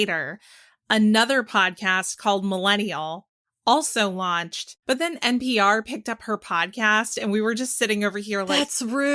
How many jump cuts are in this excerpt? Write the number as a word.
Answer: one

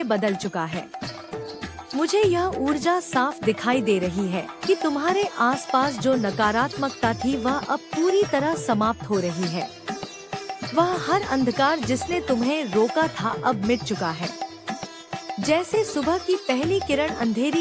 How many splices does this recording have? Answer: one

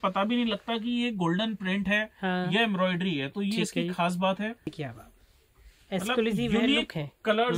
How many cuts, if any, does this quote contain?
one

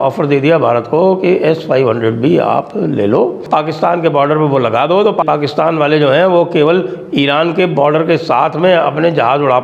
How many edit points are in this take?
two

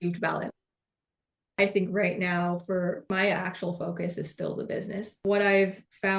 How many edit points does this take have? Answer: one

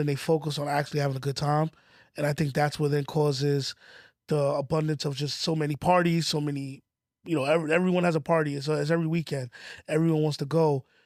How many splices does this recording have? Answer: zero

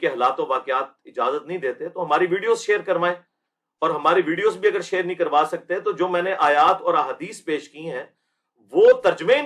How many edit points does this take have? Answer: zero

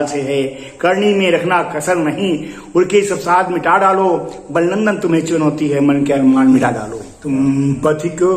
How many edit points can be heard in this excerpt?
one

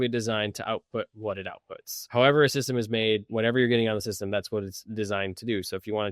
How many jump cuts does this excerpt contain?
one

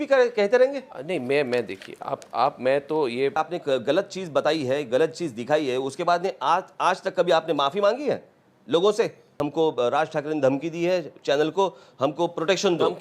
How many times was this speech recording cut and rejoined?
two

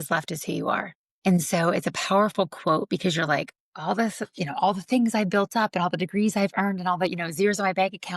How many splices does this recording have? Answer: one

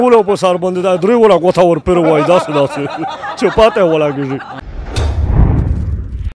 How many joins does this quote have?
one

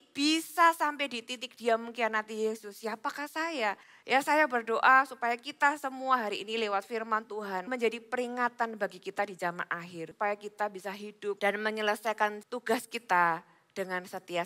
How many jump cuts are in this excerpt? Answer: five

